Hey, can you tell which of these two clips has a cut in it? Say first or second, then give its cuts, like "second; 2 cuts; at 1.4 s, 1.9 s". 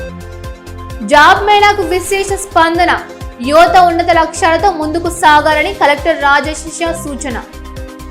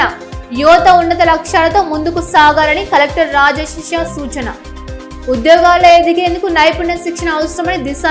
first; 1 cut; at 1.0 s